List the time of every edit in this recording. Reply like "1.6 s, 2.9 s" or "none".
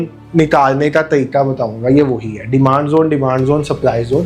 none

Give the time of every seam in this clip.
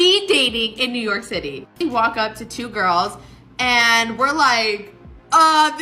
1.7 s

